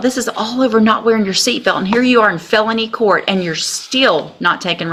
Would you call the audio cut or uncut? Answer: uncut